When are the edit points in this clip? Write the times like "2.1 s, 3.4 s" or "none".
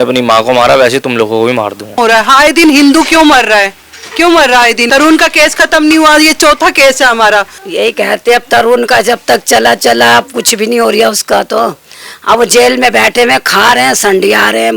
2.0 s, 4.9 s, 7.6 s